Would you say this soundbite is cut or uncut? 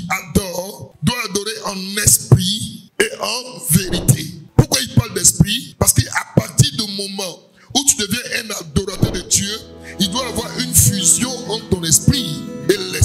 uncut